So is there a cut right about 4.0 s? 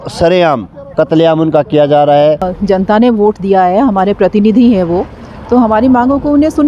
no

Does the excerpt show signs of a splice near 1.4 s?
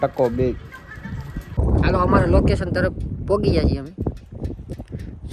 yes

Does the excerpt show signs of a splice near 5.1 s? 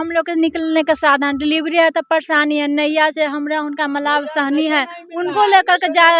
no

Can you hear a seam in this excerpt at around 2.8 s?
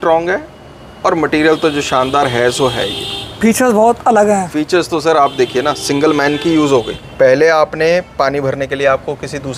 no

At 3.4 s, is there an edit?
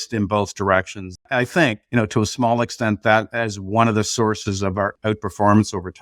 no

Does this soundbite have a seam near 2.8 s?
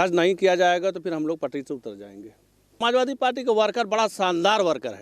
yes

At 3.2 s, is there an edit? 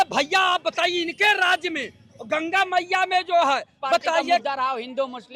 no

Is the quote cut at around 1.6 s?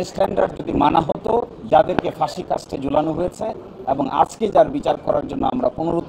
yes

